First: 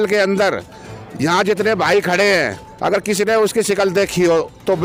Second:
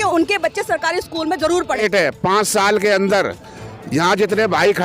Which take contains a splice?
second; 1 cut; at 1.8 s

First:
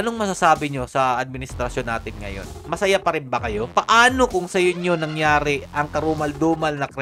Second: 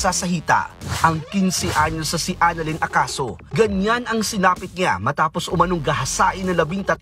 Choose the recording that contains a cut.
first; 1 cut; at 2.6 s

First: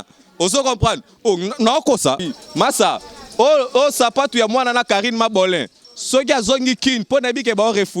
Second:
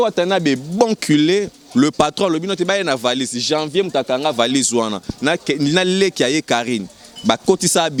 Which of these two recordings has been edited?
first; 1 cut; at 2.3 s

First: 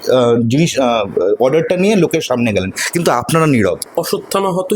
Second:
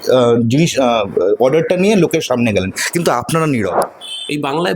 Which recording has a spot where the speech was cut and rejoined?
second; 1 cut; at 3.8 s

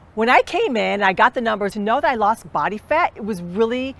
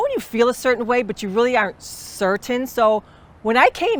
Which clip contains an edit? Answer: first; 1 cut; at 1.7 s

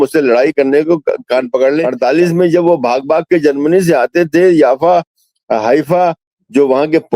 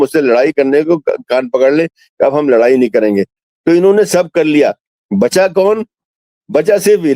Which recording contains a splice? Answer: first; 1 cut; at 1.9 s

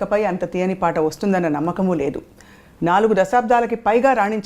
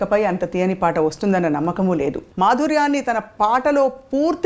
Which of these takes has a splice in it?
second; 1 cut; at 2.2 s

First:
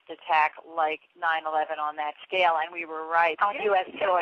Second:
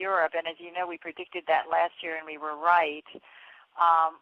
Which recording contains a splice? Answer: first; 1 cut; at 2.2 s

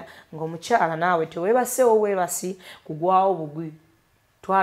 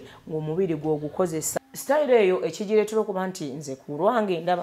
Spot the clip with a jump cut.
second; 1 cut; at 1.5 s

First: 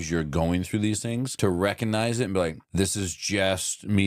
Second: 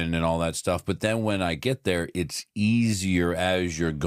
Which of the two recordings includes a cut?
first; 2 cuts; at 1.3 s, 2.6 s

